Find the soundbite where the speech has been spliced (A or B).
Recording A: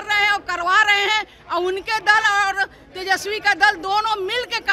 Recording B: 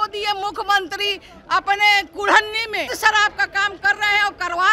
B